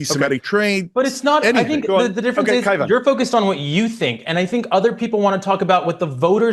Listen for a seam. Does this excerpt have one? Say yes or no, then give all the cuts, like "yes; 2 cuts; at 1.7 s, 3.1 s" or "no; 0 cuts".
yes; 1 cut; at 1.9 s